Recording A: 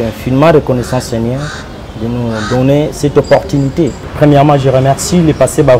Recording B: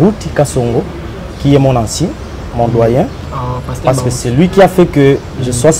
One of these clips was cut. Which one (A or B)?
A